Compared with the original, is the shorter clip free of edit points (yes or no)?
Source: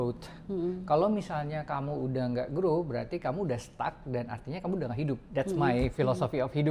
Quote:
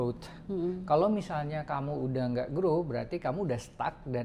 yes